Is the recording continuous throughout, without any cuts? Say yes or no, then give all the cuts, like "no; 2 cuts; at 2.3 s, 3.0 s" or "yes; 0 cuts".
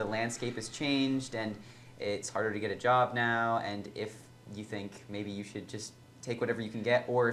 yes; 0 cuts